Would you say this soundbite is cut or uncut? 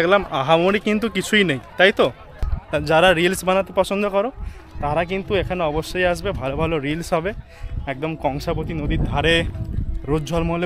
uncut